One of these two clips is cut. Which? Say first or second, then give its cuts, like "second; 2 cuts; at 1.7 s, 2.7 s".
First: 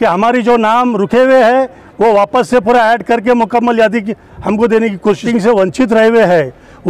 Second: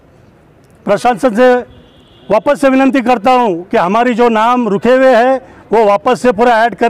first; 1 cut; at 5.3 s